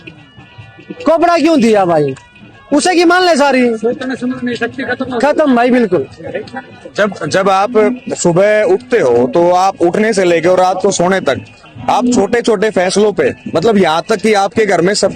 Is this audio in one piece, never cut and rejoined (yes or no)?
yes